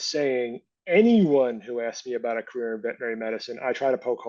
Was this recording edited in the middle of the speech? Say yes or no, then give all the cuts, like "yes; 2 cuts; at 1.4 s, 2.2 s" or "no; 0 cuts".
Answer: no; 0 cuts